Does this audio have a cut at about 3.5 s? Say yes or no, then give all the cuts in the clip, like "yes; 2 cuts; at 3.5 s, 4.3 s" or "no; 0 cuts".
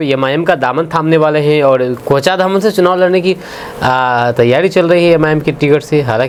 no; 0 cuts